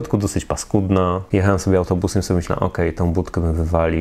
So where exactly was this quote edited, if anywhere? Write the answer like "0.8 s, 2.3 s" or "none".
1.2 s